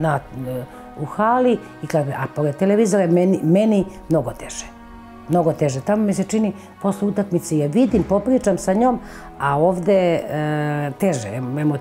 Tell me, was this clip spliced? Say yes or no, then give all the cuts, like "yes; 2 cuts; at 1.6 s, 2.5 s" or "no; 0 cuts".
no; 0 cuts